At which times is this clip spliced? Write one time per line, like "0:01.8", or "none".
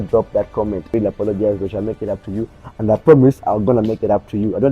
0:00.9